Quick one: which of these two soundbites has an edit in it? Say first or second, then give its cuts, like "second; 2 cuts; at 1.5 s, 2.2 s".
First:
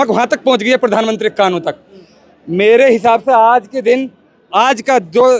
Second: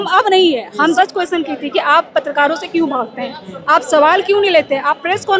second; 1 cut; at 1.0 s